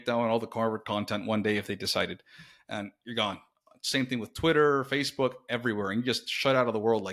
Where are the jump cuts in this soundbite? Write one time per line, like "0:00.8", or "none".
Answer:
none